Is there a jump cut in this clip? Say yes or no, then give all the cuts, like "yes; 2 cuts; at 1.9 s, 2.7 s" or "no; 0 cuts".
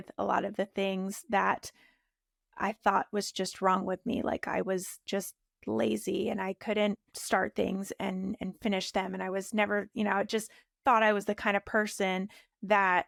no; 0 cuts